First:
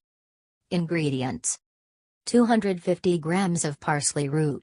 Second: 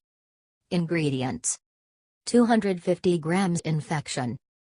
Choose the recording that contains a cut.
first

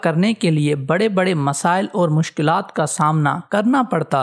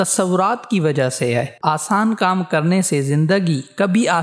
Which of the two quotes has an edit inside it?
second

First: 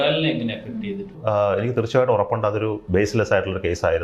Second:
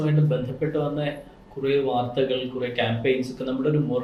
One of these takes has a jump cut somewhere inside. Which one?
first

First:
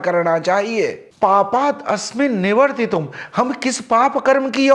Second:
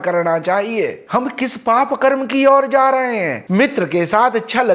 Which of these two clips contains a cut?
second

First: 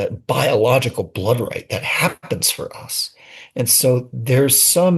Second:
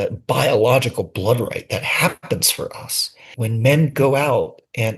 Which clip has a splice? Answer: second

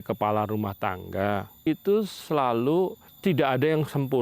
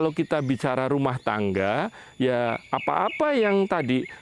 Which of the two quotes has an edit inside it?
first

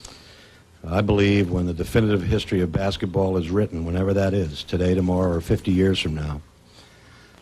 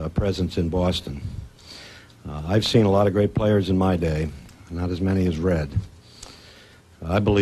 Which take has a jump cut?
first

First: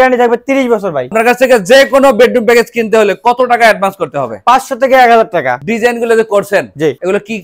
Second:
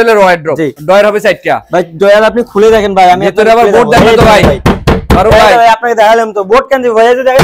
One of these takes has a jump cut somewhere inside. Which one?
first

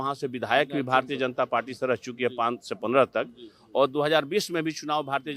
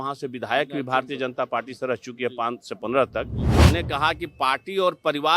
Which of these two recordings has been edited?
second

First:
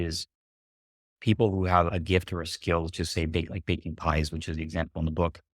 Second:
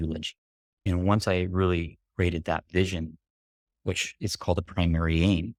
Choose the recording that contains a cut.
first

